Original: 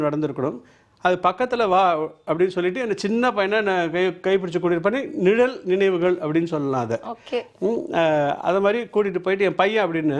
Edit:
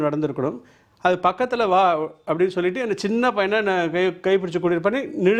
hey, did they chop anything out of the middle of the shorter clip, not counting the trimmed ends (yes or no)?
no